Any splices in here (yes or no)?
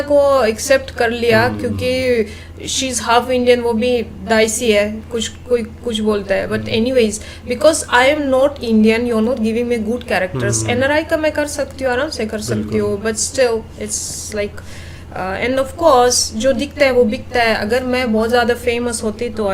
no